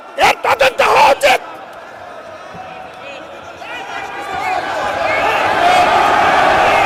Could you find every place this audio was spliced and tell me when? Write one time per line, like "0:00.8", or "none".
none